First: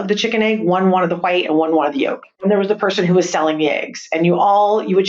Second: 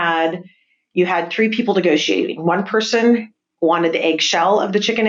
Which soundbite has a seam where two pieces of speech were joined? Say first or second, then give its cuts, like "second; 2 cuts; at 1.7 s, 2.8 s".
first; 1 cut; at 2.3 s